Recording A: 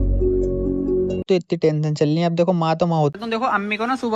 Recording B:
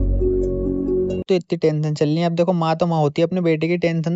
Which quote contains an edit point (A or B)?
A